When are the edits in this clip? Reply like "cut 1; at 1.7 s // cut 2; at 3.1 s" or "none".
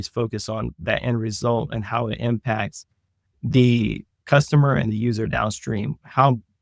none